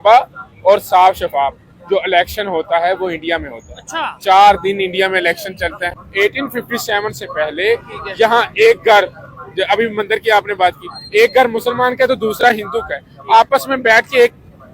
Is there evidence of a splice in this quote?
yes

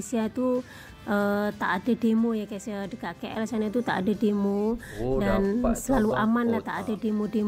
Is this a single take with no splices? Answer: yes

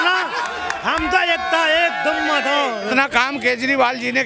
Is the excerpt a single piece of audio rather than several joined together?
no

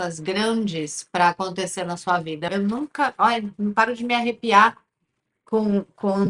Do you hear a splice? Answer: yes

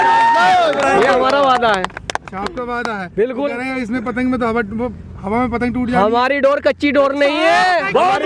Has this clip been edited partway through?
no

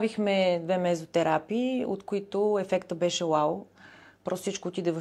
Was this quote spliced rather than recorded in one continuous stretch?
no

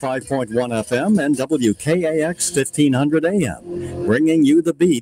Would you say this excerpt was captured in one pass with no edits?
yes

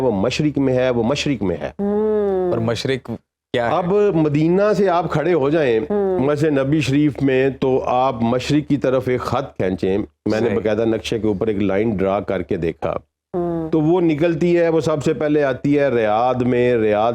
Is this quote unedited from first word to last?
yes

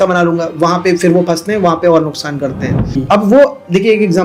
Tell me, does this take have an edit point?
yes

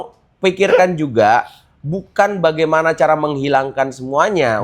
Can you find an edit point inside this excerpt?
no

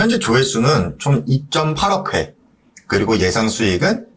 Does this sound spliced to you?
no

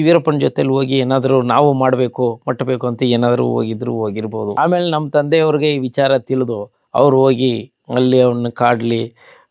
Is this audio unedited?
no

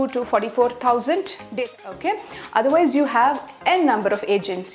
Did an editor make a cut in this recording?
yes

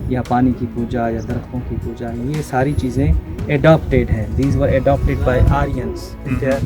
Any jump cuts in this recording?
no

